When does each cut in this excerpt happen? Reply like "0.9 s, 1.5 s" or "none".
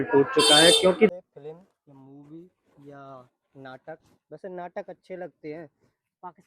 1.1 s